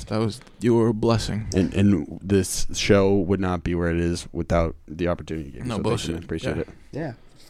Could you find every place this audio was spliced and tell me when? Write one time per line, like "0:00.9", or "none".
none